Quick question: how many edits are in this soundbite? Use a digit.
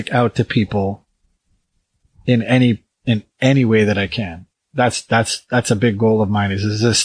0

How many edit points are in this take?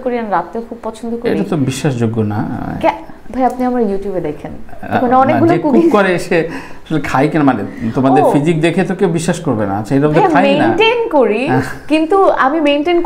0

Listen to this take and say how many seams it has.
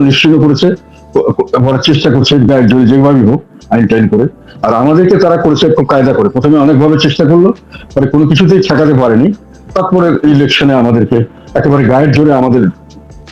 0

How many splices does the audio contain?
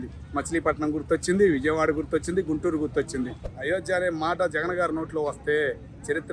1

